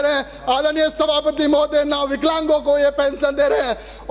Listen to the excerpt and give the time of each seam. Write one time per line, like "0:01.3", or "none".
none